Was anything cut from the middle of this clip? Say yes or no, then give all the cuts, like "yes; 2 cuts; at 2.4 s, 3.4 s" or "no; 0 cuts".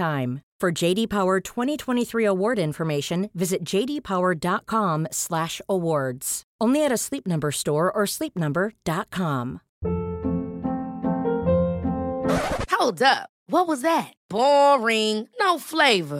yes; 1 cut; at 9.7 s